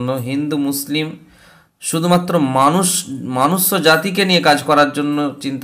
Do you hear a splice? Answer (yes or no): no